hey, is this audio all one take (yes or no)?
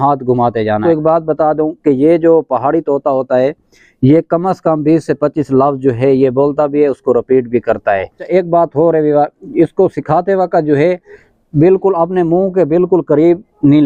no